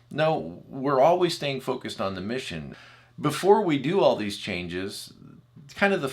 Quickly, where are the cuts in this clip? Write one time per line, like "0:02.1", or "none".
0:02.7